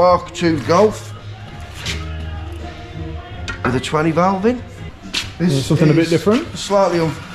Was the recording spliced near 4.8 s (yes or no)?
no